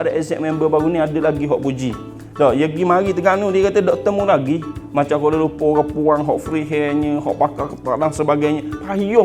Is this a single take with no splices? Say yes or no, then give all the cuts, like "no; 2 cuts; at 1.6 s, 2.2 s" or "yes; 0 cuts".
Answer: yes; 0 cuts